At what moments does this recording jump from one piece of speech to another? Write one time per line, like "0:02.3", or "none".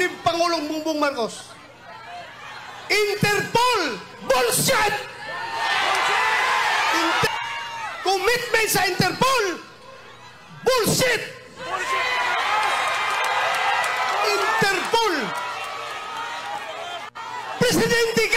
0:07.3